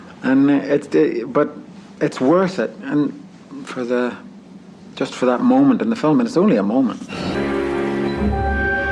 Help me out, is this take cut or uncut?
uncut